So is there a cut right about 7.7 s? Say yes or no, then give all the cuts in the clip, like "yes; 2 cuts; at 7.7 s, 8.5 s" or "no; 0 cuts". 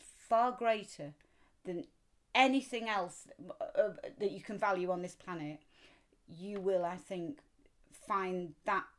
no; 0 cuts